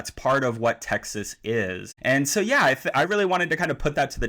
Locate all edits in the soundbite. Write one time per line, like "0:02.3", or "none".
0:01.9